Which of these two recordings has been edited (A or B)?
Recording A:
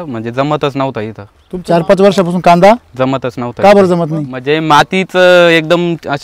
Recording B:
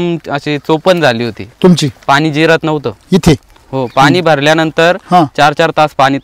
A